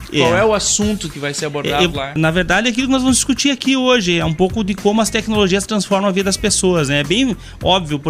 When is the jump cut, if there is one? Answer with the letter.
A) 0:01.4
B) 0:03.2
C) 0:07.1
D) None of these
D